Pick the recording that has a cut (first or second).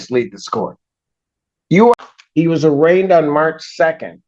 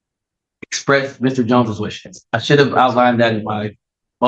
first